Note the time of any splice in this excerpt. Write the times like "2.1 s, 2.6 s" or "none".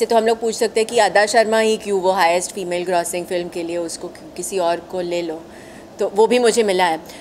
none